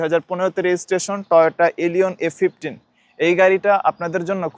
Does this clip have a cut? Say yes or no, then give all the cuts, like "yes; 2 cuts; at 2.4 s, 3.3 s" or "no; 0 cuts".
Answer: no; 0 cuts